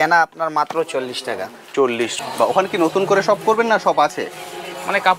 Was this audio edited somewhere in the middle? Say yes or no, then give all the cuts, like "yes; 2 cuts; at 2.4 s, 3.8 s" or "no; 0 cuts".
yes; 1 cut; at 2.1 s